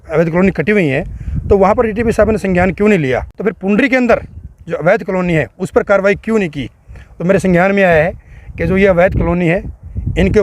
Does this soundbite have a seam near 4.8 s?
no; 1 cut; at 3.3 s

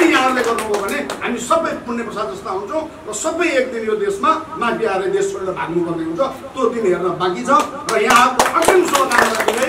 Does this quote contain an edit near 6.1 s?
no; 0 cuts

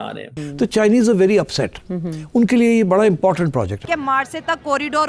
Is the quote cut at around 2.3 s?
no; 1 cut; at 3.8 s

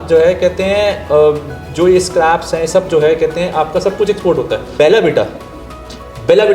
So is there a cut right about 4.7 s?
yes; 1 cut; at 4.7 s

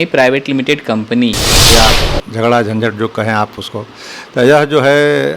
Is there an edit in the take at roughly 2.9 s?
no; 1 cut; at 1.7 s

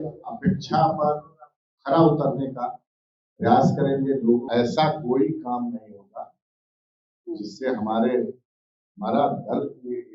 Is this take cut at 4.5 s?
yes; 1 cut; at 4.5 s

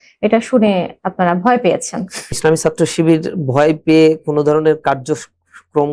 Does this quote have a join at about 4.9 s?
no; 1 cut; at 2.4 s

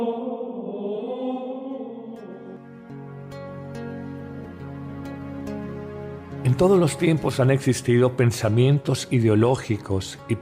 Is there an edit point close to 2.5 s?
yes; 1 cut; at 2.5 s

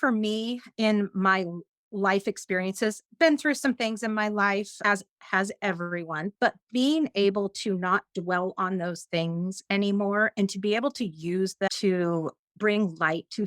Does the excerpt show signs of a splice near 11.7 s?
yes; 1 cut; at 11.7 s

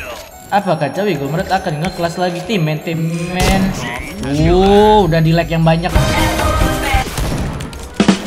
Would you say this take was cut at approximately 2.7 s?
no; 1 cut; at 7.0 s

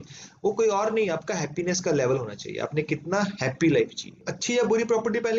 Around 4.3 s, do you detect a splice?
yes; 1 cut; at 4.3 s

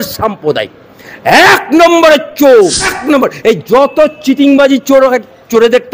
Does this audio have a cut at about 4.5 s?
no; 1 cut; at 3.0 s

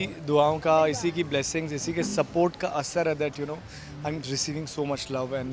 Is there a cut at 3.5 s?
no; 0 cuts

